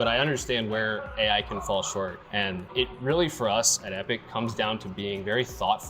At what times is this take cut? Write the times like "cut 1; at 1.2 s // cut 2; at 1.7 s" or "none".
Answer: cut 1; at 2.7 s